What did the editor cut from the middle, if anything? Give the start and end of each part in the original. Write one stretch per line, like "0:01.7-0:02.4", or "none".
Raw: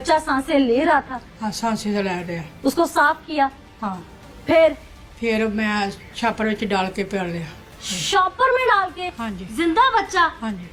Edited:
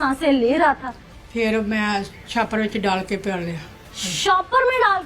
0:01.3-0:04.9